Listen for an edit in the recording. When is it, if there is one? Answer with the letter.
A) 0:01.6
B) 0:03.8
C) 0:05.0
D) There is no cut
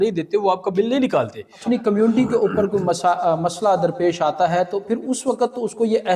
A